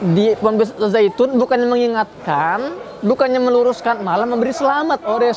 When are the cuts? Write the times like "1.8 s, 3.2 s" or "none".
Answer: none

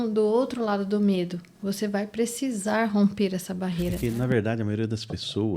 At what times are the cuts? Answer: 4.0 s

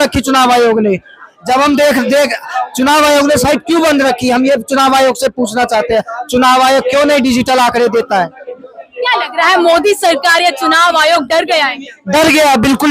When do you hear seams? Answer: none

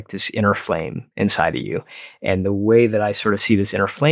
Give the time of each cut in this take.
none

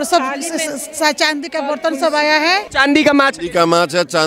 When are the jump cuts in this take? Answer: 2.7 s

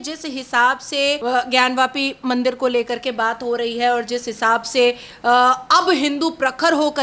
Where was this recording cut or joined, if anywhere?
1.2 s

